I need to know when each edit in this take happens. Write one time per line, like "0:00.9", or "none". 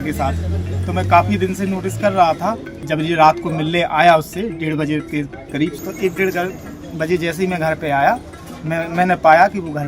0:02.8
0:05.8